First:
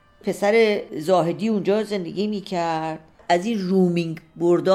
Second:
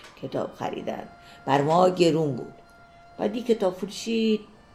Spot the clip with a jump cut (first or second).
first